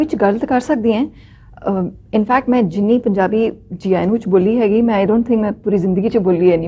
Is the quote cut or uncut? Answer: uncut